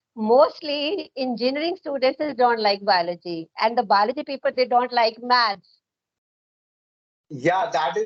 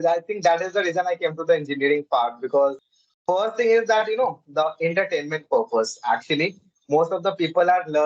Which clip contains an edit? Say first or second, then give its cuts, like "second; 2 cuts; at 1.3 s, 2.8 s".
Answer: second; 1 cut; at 2.8 s